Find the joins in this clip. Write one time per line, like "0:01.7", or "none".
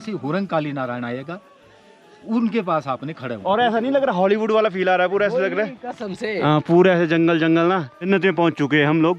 0:03.4
0:08.1